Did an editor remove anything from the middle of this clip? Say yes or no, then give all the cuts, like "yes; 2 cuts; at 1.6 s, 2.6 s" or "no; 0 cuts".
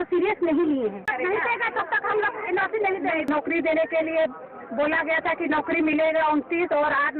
yes; 2 cuts; at 1.1 s, 3.3 s